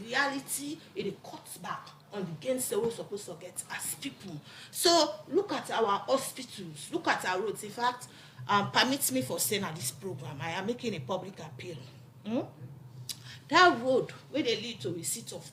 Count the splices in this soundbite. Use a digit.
0